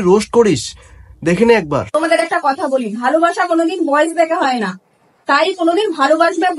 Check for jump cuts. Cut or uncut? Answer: uncut